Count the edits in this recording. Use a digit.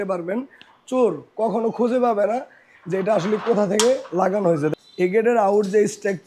1